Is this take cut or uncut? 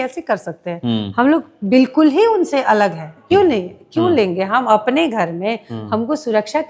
cut